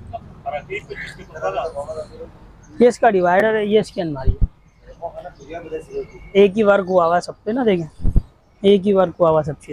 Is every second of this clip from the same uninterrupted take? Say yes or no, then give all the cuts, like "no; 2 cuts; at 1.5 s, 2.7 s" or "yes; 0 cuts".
no; 1 cut; at 6.3 s